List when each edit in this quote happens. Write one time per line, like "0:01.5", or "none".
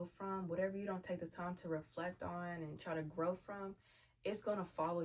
none

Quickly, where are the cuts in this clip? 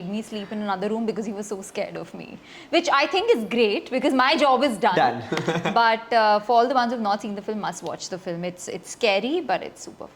none

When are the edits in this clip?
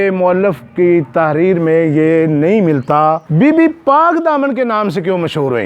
0:03.2

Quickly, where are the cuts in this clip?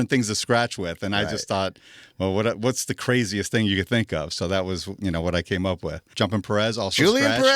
0:06.1

